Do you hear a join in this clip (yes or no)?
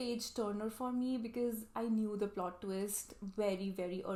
no